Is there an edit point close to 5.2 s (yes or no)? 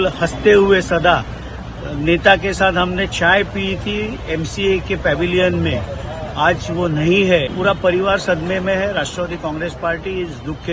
no